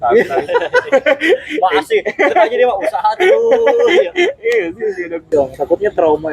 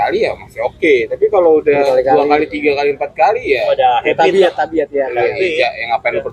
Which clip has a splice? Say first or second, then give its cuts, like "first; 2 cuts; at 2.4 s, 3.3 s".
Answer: first; 1 cut; at 5.3 s